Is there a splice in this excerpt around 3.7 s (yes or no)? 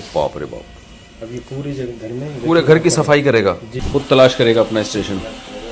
yes